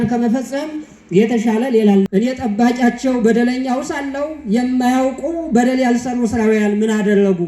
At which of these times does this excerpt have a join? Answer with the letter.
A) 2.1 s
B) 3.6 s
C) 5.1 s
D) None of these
A